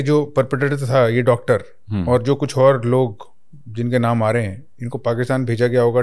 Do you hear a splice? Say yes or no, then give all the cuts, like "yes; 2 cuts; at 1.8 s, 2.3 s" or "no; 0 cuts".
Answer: no; 0 cuts